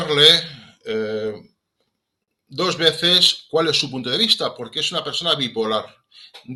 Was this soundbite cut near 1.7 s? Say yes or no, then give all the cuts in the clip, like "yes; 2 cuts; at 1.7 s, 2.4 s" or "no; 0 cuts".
no; 0 cuts